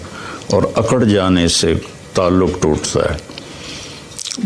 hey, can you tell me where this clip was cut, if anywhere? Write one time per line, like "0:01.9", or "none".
none

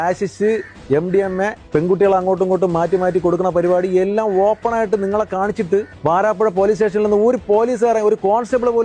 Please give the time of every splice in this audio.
none

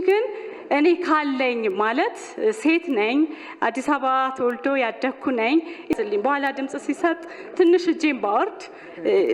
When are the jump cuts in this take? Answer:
0:05.9

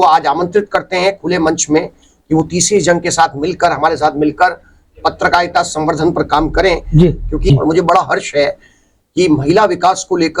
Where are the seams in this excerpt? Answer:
0:07.5

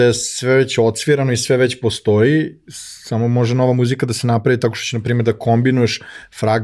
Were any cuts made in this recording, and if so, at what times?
none

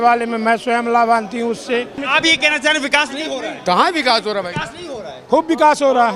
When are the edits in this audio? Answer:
0:02.0

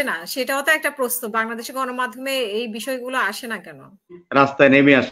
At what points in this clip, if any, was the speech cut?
0:04.2

